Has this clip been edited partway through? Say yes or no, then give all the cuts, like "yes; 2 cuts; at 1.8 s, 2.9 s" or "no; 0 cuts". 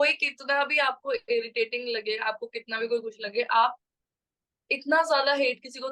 no; 0 cuts